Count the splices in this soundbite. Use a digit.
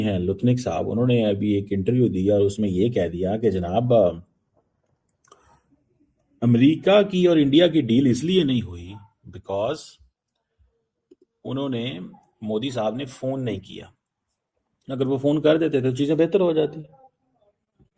0